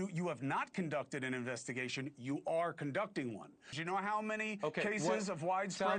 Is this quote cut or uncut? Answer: cut